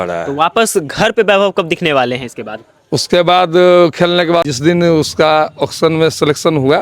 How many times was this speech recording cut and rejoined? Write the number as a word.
one